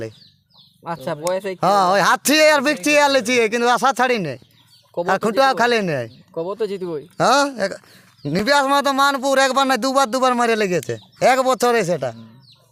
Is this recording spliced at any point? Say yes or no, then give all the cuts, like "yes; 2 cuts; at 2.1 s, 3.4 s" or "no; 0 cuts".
no; 0 cuts